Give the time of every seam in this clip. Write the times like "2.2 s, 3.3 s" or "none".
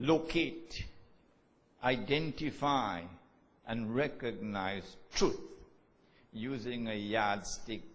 4.0 s